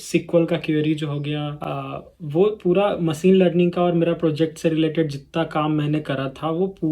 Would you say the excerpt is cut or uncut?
cut